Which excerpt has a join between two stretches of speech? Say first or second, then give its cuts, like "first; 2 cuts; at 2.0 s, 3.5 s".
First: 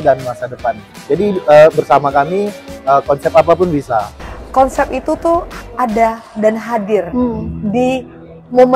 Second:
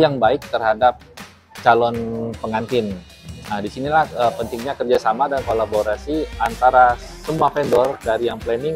first; 1 cut; at 4.1 s